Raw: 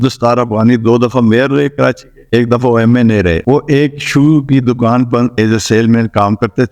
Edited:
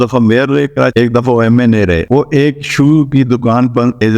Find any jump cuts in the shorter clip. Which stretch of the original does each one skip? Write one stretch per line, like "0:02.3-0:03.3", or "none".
0:01.9-0:02.3